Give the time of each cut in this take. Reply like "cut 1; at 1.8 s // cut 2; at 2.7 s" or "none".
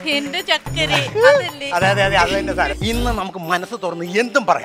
cut 1; at 2.8 s